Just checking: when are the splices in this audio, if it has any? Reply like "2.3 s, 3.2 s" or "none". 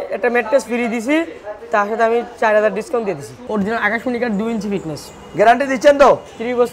3.5 s